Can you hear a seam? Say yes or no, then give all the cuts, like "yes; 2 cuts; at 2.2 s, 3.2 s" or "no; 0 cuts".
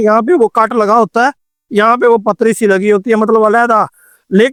no; 0 cuts